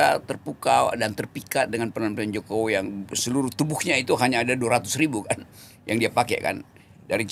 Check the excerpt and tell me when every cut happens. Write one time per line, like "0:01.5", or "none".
none